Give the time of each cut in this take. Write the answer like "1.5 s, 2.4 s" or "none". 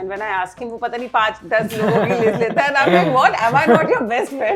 none

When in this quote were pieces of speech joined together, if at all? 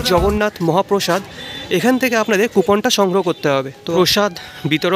3.7 s

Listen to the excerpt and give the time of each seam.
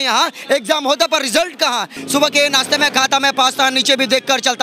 2.0 s

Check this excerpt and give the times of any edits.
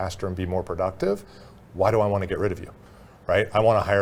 none

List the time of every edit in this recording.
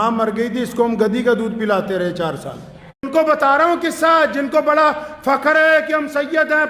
3.1 s

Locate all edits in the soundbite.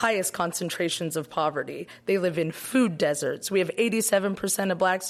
none

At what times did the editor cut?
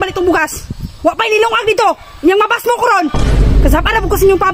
none

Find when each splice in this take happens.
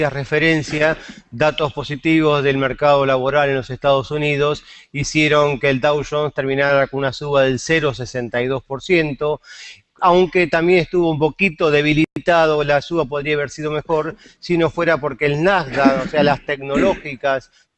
14.9 s

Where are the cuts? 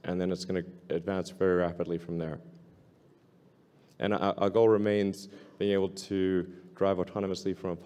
none

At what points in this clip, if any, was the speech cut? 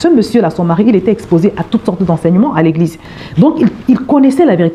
2.9 s

